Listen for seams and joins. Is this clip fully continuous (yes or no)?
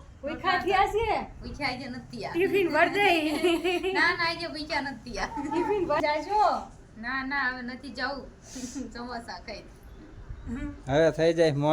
yes